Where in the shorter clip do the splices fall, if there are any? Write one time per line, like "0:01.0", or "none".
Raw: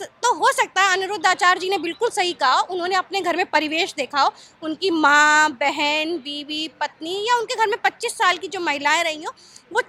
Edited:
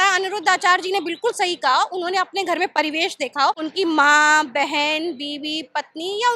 0:03.6